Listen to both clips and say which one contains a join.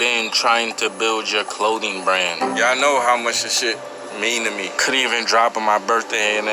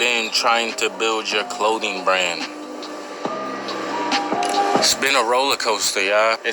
first; 2 cuts; at 2.4 s, 4.8 s

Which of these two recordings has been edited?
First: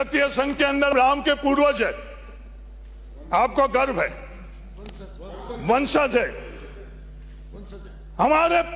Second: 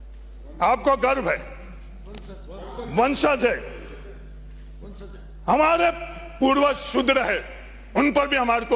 first; 1 cut; at 0.9 s

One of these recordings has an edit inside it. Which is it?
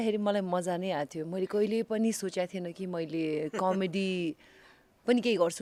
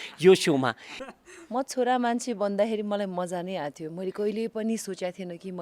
second; 1 cut; at 1.1 s

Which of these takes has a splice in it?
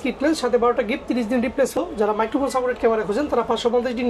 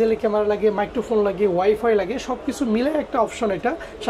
first; 1 cut; at 1.8 s

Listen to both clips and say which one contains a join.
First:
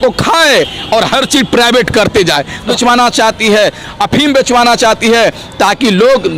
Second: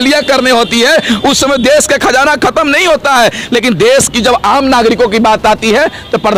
first; 1 cut; at 2.6 s

